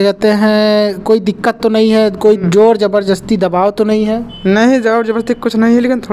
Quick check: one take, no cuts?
yes; 0 cuts

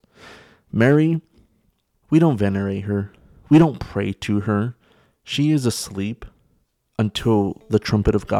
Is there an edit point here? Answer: no; 0 cuts

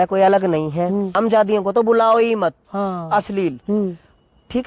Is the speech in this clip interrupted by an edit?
yes; 1 cut; at 1.2 s

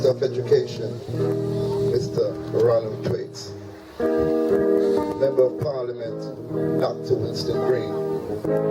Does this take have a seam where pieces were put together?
no; 0 cuts

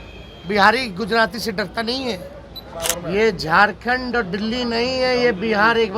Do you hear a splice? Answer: yes; 1 cut; at 2.7 s

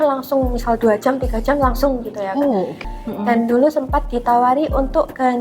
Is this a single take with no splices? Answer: no; 1 cut; at 2.8 s

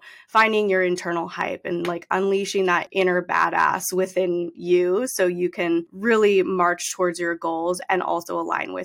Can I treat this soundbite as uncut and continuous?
no; 2 cuts; at 2.9 s, 5.9 s

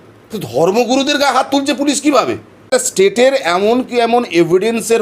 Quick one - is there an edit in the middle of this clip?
yes; 1 cut; at 2.7 s

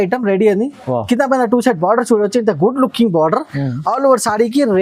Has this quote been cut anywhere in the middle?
no; 0 cuts

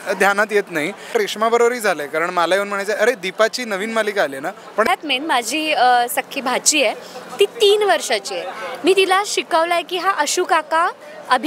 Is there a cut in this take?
yes; 2 cuts; at 1.1 s, 4.9 s

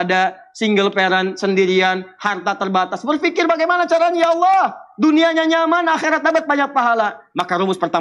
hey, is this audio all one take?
yes; 0 cuts

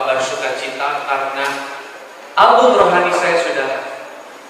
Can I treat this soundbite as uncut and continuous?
yes; 0 cuts

